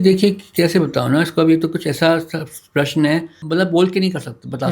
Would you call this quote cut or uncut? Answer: cut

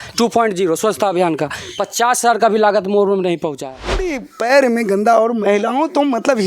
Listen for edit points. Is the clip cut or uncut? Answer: cut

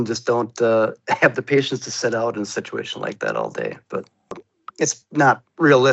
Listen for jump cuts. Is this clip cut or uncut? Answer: cut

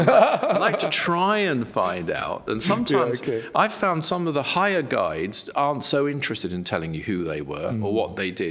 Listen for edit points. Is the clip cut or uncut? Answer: uncut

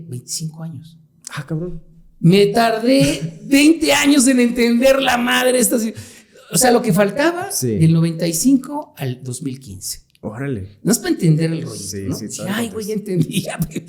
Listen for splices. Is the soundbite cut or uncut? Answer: uncut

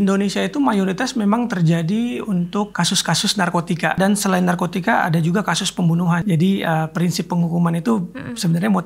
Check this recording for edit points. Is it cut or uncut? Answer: cut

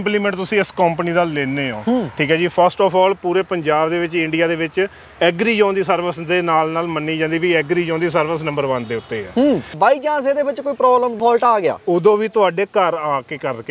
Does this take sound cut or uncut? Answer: cut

